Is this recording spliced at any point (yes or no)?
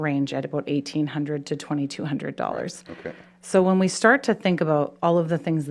no